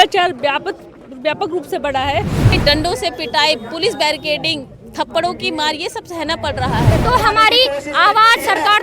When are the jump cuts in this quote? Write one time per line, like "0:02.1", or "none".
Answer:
0:02.5
0:06.9